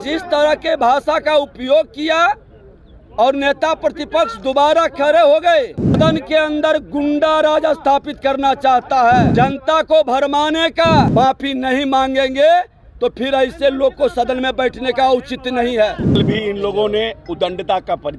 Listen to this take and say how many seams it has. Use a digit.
4